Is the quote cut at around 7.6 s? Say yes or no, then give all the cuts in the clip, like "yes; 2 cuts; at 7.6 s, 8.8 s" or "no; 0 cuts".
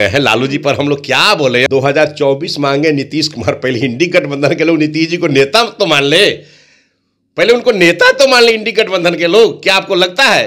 no; 1 cut; at 1.7 s